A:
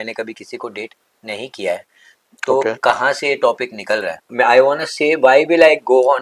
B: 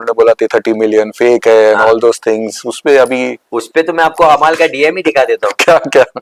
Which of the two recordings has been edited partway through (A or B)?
A